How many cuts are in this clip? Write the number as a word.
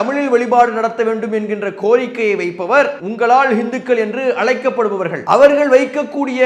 two